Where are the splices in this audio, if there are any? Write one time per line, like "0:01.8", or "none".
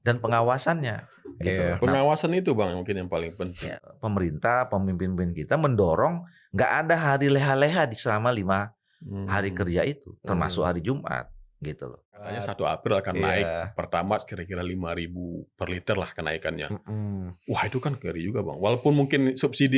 0:03.8
0:12.3